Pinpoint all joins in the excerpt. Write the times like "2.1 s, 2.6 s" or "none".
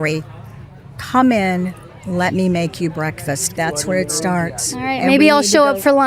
3.5 s